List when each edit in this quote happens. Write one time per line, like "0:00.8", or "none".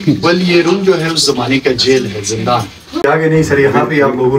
0:03.0